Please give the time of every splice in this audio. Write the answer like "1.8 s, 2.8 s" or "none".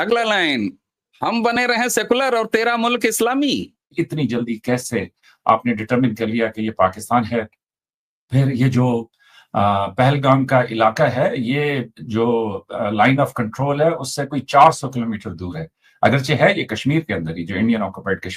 3.9 s